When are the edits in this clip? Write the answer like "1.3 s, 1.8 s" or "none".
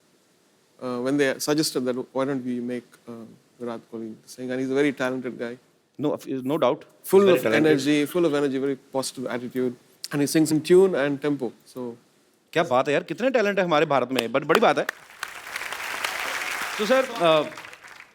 16.7 s